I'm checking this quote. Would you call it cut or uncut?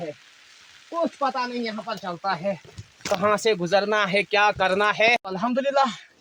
uncut